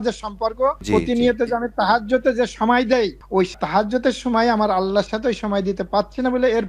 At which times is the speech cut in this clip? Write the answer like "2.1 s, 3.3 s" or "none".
0.8 s, 3.6 s